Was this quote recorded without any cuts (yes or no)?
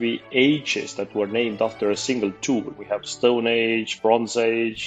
yes